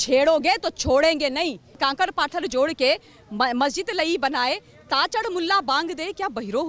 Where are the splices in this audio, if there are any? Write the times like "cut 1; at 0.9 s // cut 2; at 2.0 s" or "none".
cut 1; at 1.7 s